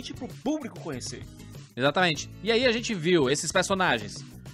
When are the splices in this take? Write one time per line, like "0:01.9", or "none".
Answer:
0:02.3